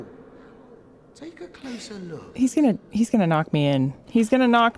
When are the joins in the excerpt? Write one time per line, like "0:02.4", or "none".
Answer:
none

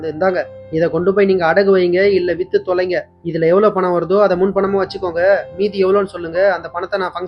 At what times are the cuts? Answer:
none

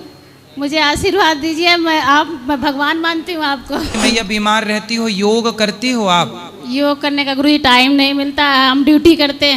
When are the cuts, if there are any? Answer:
0:03.9

